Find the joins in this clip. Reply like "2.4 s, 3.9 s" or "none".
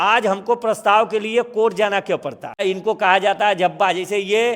2.6 s